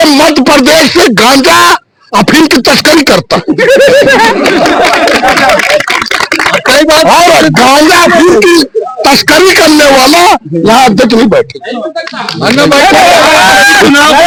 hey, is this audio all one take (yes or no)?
yes